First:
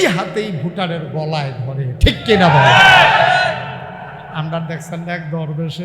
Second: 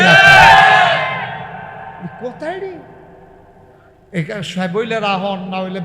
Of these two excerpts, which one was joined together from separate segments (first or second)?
first